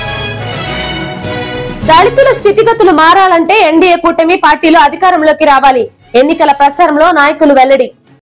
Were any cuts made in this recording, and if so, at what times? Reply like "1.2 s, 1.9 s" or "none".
1.3 s